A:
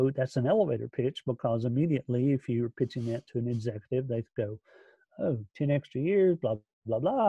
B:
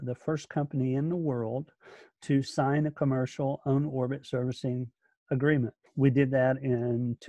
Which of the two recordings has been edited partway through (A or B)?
B